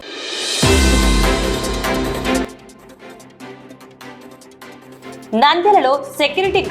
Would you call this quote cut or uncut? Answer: cut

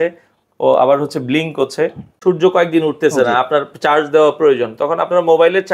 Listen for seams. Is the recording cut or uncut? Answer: cut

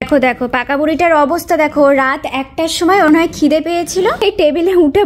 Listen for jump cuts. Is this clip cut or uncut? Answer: cut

